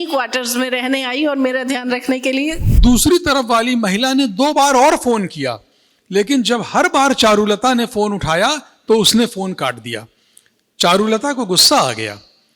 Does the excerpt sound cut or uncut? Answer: cut